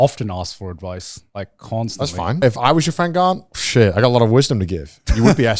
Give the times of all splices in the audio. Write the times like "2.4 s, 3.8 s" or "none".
1.2 s, 2.4 s